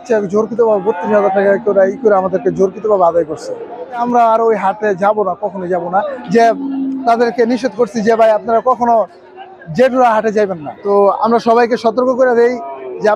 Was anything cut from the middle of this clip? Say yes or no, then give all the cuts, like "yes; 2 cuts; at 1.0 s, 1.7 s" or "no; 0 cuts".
yes; 3 cuts; at 4.0 s, 6.2 s, 10.7 s